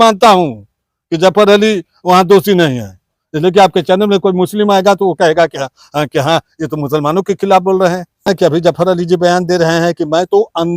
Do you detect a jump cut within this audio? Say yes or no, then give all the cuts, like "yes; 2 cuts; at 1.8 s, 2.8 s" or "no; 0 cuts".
yes; 1 cut; at 8.2 s